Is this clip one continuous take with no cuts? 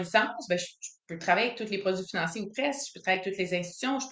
yes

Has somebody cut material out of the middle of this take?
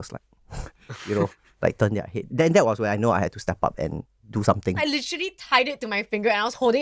yes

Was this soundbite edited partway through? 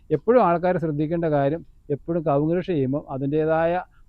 no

